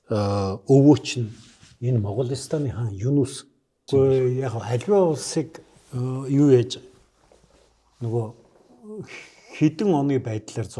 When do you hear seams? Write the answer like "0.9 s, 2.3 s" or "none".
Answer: 3.7 s